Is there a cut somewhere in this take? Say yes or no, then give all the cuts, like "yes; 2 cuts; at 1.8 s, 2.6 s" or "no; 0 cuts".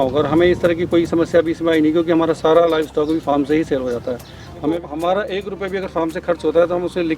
yes; 1 cut; at 4.6 s